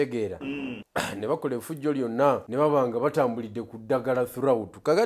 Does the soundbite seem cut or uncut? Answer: cut